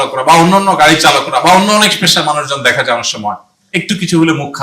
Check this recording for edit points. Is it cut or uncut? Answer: uncut